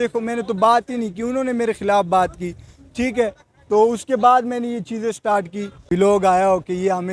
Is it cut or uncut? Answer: cut